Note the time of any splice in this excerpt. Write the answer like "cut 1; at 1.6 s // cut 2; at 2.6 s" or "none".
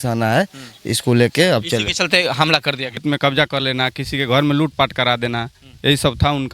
cut 1; at 3.0 s